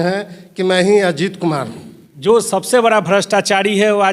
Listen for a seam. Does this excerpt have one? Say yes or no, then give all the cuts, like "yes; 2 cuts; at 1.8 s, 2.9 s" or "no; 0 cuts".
yes; 1 cut; at 2.0 s